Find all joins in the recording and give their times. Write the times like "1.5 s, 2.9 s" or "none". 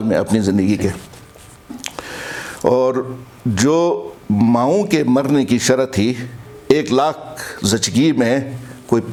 none

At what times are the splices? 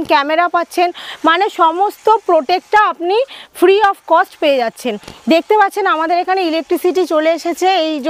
none

